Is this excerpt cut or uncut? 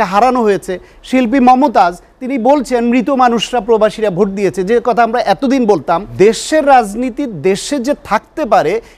cut